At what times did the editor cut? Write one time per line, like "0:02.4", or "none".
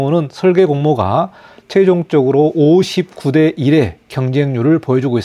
none